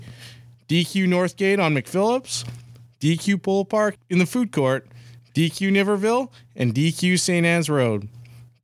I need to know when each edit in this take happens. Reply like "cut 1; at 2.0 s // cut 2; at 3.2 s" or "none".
cut 1; at 4.0 s